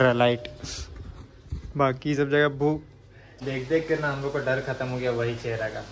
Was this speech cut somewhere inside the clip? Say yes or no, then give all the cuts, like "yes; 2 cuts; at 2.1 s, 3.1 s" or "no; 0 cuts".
yes; 1 cut; at 3.4 s